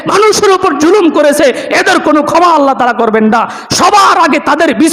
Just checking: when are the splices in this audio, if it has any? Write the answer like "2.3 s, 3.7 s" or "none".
none